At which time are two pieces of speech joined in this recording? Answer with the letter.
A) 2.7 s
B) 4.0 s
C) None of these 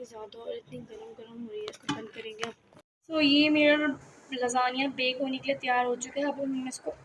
A